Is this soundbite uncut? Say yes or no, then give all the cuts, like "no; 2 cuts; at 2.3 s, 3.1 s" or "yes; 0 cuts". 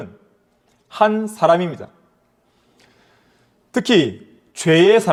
yes; 0 cuts